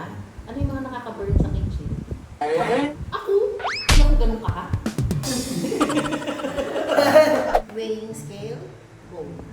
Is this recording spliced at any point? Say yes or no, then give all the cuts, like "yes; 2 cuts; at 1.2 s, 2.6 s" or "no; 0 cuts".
yes; 1 cut; at 7.6 s